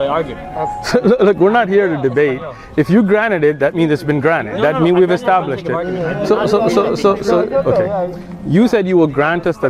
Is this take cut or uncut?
uncut